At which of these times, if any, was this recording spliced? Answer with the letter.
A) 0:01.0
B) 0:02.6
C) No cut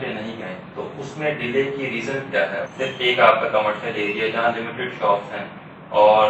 B